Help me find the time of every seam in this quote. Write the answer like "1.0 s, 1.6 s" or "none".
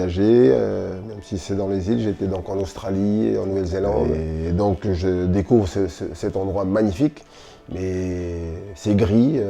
4.3 s